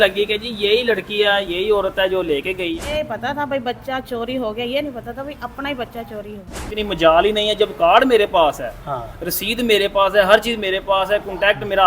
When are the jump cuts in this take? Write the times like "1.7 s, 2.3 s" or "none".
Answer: 2.8 s, 6.6 s